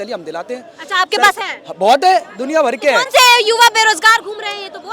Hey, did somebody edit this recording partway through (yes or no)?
no